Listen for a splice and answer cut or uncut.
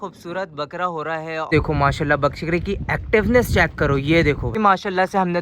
cut